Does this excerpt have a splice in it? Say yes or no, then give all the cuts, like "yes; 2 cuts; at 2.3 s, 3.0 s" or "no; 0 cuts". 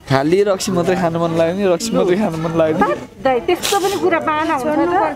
no; 0 cuts